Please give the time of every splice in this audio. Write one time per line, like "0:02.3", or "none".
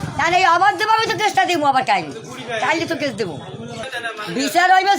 0:03.8